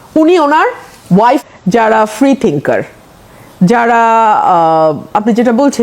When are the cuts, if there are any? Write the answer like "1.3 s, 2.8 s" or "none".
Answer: 1.4 s